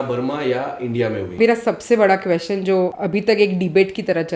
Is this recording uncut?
no; 2 cuts; at 1.3 s, 3.0 s

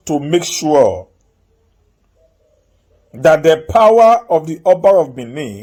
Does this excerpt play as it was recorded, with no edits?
yes; 0 cuts

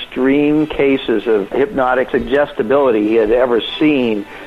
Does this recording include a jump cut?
yes; 1 cut; at 2.0 s

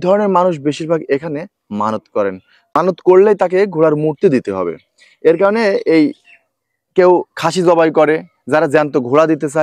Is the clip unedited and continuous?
no; 1 cut; at 2.8 s

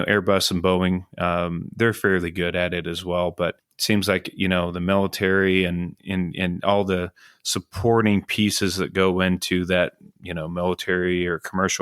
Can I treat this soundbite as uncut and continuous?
no; 2 cuts; at 3.7 s, 5.9 s

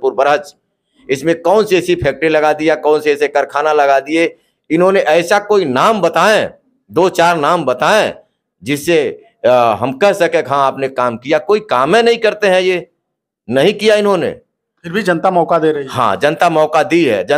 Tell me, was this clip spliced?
no; 0 cuts

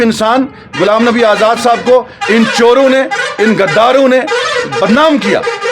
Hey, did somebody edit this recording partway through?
no; 0 cuts

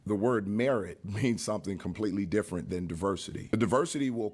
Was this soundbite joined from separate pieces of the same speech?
yes; 2 cuts; at 1.0 s, 3.5 s

